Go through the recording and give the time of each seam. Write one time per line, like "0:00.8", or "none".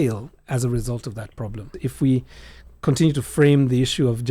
0:01.8